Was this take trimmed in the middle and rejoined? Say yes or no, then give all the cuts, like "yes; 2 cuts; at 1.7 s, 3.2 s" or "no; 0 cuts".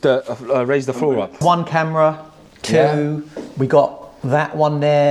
yes; 1 cut; at 1.4 s